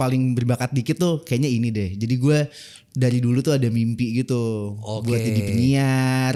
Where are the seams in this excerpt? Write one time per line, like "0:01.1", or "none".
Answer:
none